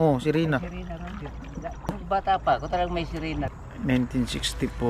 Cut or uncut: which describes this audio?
cut